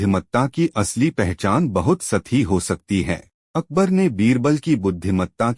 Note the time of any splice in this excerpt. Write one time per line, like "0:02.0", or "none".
0:03.3